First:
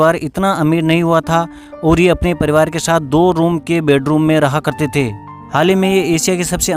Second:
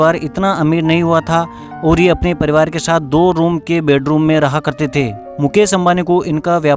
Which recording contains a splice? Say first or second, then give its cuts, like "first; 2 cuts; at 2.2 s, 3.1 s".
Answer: first; 1 cut; at 5.2 s